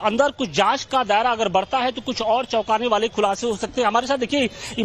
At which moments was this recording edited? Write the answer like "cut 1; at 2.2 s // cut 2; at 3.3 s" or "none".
cut 1; at 3.0 s